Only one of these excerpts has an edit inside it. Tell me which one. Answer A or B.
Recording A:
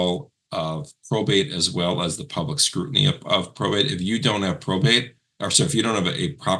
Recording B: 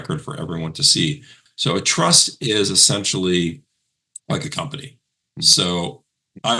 B